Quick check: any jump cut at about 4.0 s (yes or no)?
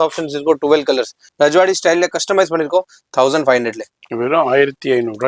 no